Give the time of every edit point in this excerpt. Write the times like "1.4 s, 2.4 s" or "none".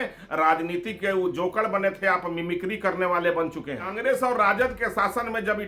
3.9 s